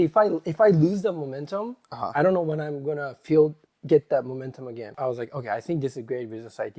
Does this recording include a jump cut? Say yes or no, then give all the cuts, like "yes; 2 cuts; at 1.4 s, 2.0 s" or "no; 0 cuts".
yes; 1 cut; at 4.9 s